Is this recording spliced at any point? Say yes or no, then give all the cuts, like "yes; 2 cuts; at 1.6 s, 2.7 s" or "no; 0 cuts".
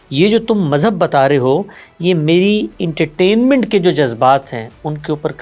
no; 0 cuts